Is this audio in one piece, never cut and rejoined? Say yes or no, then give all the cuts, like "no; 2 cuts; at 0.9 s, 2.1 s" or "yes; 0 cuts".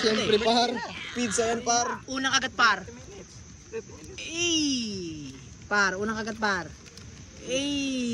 yes; 0 cuts